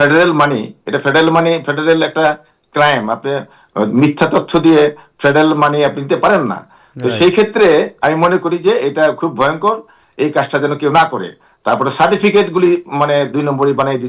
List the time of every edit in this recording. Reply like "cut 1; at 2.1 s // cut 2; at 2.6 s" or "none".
none